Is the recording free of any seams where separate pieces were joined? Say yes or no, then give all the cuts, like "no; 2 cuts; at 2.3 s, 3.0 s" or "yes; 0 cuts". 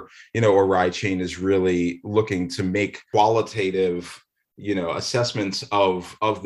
no; 1 cut; at 3.0 s